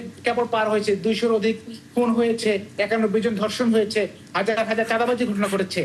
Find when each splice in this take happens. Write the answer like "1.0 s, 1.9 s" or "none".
none